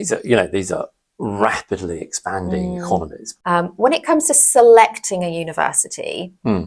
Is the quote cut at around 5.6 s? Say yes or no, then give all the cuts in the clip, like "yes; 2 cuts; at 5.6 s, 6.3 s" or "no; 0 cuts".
no; 1 cut; at 3.4 s